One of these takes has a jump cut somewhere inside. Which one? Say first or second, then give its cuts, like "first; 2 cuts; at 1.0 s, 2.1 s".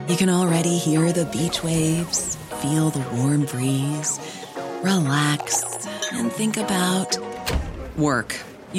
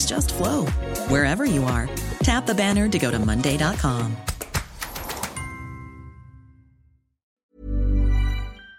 second; 1 cut; at 7.4 s